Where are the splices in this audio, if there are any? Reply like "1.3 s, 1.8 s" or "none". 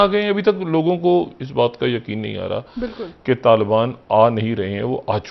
none